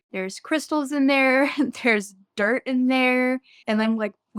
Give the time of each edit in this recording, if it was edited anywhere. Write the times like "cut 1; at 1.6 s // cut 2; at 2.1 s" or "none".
none